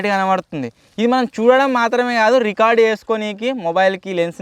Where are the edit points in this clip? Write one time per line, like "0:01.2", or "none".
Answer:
none